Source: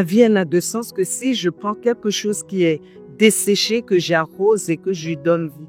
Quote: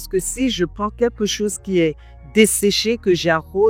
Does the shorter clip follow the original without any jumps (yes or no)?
yes